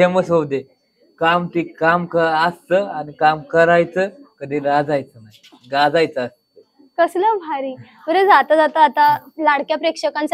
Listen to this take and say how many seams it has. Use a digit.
0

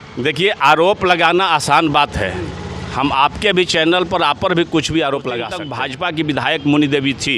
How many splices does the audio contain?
1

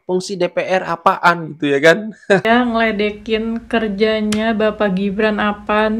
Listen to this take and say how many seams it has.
1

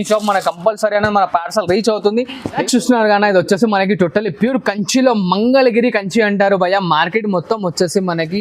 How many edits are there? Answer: 1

